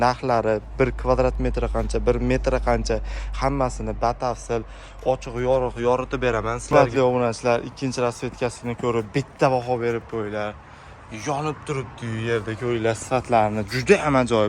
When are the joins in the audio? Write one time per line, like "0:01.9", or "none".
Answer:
0:06.6